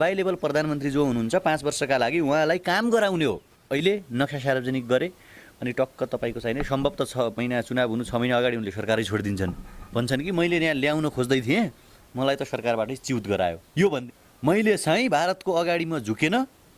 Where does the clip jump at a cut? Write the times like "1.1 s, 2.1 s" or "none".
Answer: 3.5 s, 14.0 s